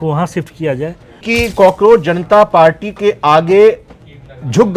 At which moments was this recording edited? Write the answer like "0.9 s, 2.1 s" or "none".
1.2 s